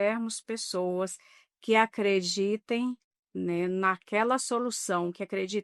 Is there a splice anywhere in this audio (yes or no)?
no